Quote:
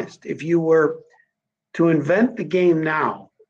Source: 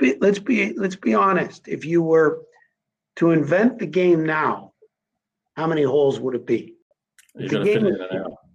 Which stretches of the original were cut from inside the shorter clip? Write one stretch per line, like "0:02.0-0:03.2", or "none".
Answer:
none